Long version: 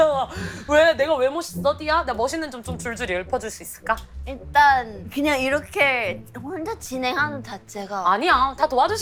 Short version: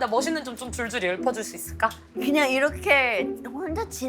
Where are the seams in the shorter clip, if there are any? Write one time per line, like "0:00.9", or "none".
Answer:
0:02.1